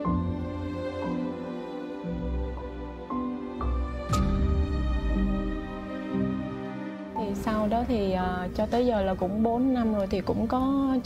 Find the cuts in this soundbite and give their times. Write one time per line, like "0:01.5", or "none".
none